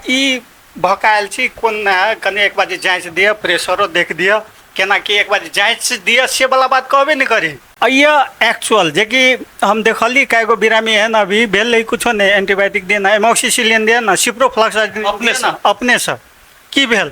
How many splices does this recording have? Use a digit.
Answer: 1